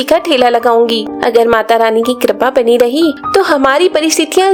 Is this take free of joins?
yes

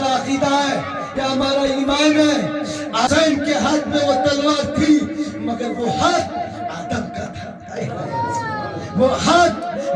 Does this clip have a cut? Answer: yes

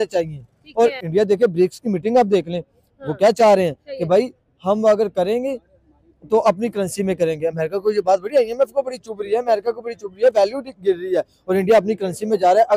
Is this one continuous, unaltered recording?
no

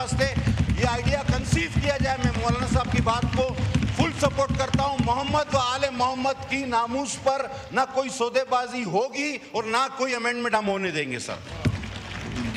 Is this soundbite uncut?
yes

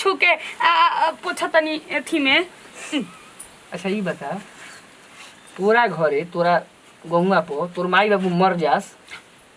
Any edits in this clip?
no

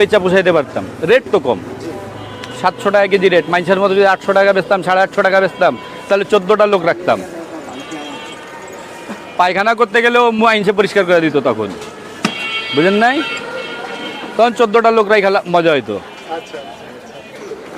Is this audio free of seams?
yes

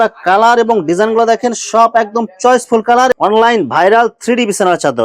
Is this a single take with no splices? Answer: no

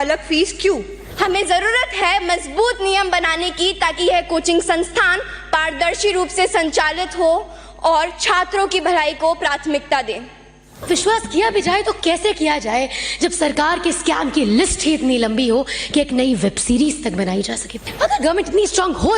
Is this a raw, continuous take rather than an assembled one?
no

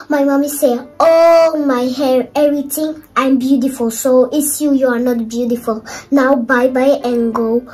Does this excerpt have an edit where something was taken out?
no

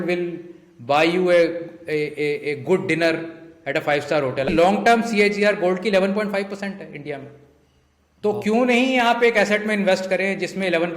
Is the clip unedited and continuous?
no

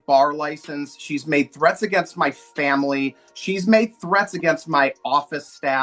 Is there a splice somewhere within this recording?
no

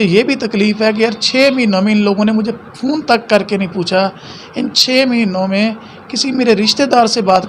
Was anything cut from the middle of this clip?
no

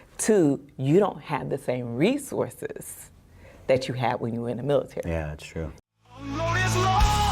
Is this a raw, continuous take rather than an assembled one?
no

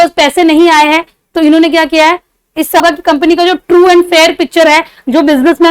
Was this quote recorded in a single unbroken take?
yes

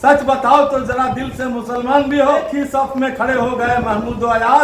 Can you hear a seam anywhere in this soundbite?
yes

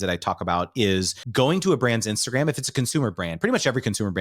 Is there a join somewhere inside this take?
yes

